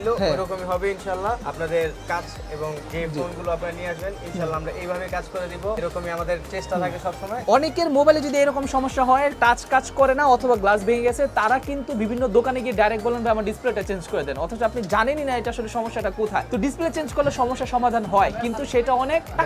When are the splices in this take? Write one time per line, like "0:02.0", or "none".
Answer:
0:01.5
0:02.8
0:05.8
0:07.4